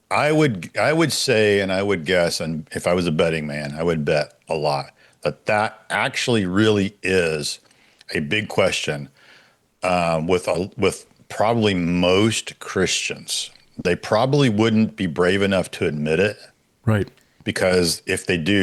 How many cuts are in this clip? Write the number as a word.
zero